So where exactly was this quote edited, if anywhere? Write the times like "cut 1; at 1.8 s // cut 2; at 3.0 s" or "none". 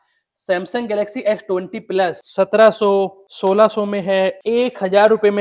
cut 1; at 2.2 s // cut 2; at 3.2 s // cut 3; at 4.4 s